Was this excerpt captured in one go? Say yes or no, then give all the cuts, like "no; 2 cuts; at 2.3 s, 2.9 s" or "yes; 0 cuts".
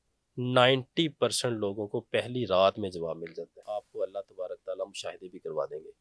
no; 1 cut; at 3.6 s